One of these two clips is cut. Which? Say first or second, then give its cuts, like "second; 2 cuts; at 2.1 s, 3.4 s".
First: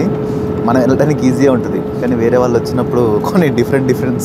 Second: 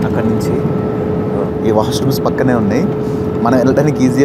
second; 1 cut; at 1.4 s